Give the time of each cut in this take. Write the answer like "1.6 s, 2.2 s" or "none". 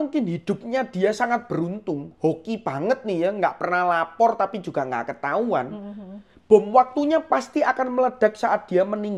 none